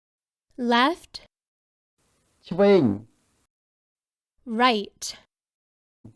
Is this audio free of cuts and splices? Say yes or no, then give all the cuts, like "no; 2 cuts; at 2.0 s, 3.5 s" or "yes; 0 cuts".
yes; 0 cuts